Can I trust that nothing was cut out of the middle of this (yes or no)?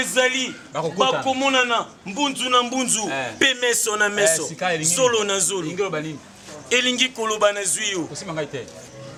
yes